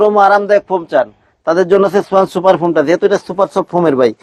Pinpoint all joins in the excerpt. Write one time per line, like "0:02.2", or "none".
none